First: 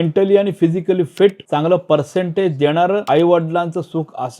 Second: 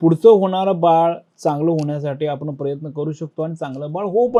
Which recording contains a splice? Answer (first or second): first